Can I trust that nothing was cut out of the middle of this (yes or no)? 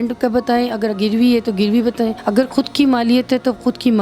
no